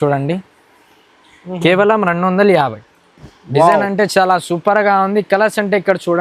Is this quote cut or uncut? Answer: uncut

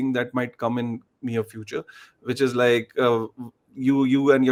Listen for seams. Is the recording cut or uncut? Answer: uncut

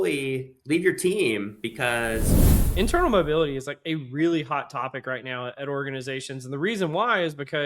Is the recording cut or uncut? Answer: cut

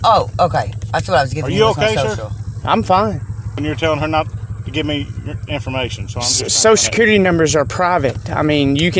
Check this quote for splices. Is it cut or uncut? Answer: cut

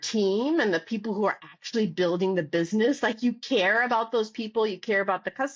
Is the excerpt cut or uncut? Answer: uncut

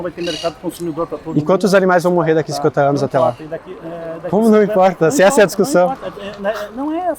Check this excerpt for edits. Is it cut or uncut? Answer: uncut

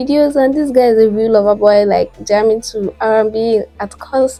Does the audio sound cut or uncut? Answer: uncut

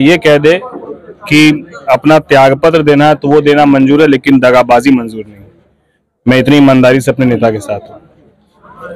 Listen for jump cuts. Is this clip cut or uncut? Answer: uncut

